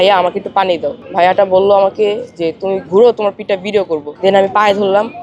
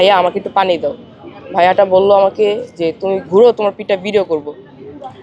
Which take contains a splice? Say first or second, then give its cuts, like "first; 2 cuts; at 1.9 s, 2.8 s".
first; 2 cuts; at 1.0 s, 4.1 s